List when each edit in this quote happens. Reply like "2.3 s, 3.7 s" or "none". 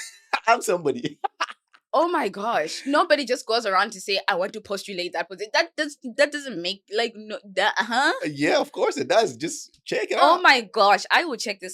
none